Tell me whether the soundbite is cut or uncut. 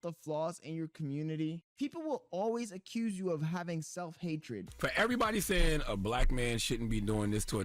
cut